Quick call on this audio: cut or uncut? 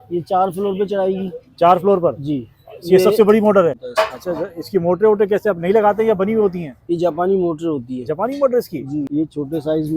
cut